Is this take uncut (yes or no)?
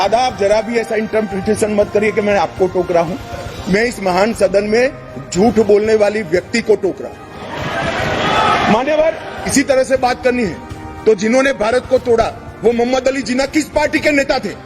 no